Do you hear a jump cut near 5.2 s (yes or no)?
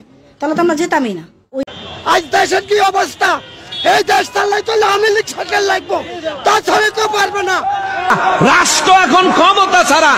no